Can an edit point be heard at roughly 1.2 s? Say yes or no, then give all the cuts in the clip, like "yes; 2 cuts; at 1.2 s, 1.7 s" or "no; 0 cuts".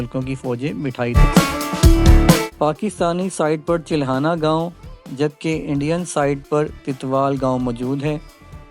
yes; 2 cuts; at 1.2 s, 2.5 s